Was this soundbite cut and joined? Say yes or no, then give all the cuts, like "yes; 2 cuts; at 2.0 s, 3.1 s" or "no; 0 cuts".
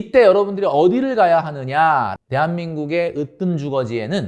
yes; 1 cut; at 2.1 s